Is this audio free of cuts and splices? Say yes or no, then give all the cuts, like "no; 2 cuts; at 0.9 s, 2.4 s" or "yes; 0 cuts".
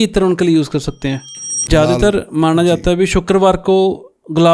no; 1 cut; at 1.6 s